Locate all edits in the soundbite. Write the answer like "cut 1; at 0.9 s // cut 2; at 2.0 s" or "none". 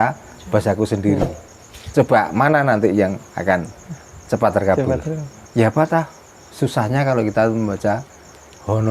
cut 1; at 5.3 s